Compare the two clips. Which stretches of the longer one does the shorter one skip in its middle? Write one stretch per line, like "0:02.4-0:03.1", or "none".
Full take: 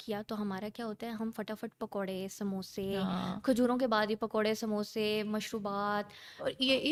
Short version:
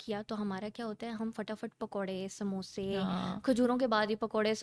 none